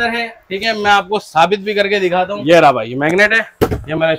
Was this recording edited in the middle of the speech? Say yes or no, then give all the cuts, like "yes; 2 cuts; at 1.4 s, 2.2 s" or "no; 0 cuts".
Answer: yes; 1 cut; at 2.3 s